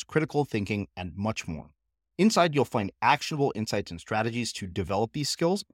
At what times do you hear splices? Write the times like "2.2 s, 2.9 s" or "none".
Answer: none